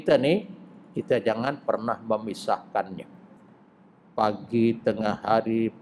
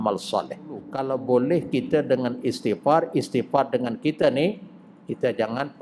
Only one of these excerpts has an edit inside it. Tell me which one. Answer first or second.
second